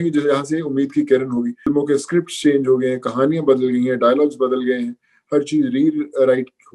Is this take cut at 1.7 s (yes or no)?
yes